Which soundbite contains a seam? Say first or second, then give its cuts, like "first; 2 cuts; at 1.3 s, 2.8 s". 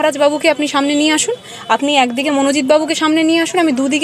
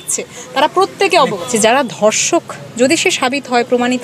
second; 1 cut; at 1.4 s